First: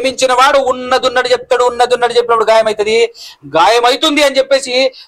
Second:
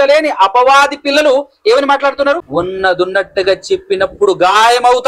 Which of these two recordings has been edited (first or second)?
second